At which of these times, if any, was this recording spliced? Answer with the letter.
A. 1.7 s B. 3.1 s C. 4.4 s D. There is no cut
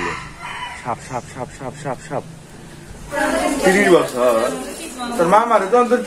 B